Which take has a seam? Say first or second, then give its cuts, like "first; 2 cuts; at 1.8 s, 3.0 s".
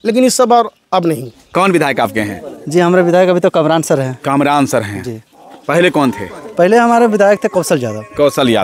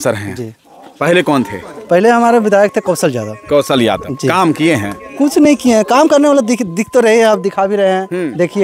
first; 1 cut; at 1.4 s